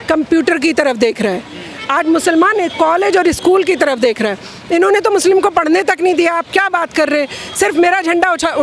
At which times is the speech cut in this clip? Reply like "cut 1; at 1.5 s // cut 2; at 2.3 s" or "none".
none